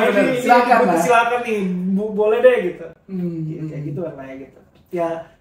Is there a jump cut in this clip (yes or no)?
no